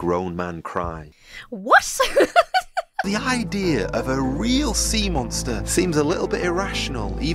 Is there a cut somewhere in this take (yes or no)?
yes